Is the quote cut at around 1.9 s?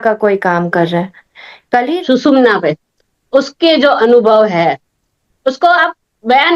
yes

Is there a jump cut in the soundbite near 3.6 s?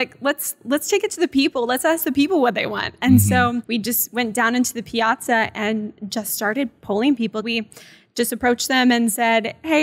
yes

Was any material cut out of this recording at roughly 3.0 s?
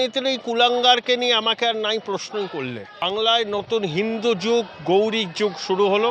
yes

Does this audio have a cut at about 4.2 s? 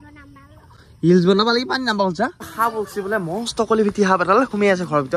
no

